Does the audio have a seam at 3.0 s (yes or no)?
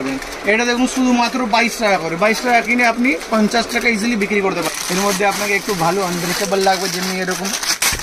no